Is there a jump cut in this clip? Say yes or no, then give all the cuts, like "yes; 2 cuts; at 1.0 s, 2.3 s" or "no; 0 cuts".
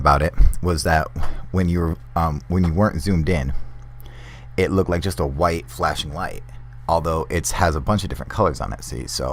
no; 0 cuts